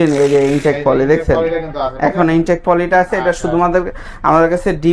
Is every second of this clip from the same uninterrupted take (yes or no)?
yes